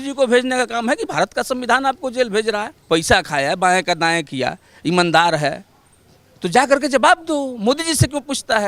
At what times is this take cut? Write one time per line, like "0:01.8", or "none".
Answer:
0:02.7

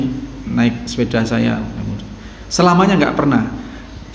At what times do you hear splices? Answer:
none

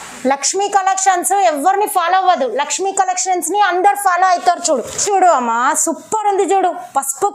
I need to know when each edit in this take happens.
0:05.0

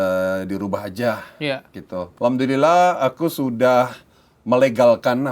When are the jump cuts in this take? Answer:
0:02.1

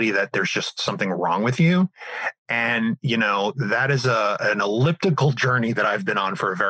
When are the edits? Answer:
none

